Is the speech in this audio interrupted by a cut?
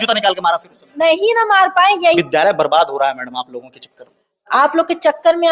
yes; 1 cut; at 2.2 s

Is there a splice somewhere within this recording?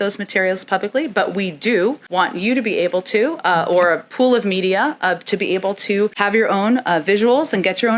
yes; 2 cuts; at 2.0 s, 6.2 s

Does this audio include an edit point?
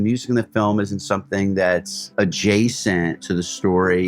yes; 2 cuts; at 2.0 s, 3.2 s

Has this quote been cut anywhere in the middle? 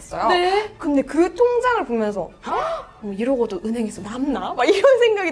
no; 0 cuts

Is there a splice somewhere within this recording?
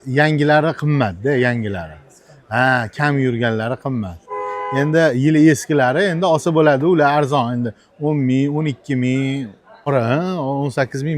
yes; 1 cut; at 9.9 s

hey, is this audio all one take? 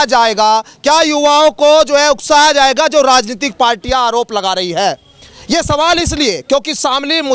yes; 0 cuts

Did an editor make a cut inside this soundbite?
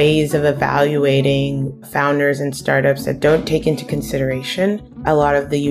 no; 0 cuts

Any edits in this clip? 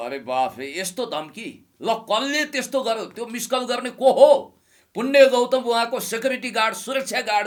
no; 0 cuts

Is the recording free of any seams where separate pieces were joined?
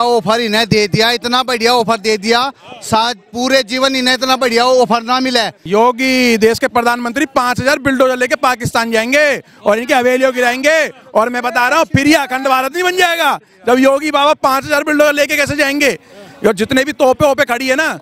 no; 1 cut; at 5.6 s

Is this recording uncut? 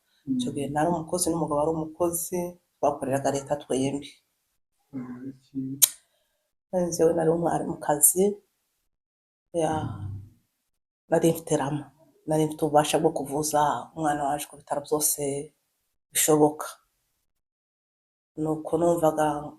yes; 0 cuts

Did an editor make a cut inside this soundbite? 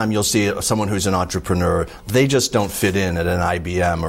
no; 0 cuts

